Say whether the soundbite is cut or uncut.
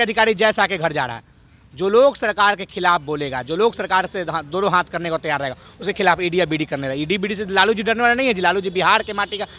uncut